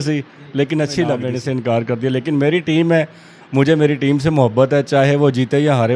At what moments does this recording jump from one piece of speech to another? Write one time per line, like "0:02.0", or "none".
0:01.3